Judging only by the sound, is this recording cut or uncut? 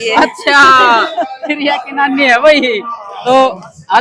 uncut